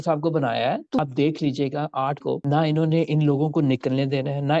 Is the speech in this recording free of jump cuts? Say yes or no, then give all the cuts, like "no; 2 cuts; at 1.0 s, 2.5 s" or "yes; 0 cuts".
no; 1 cut; at 1.0 s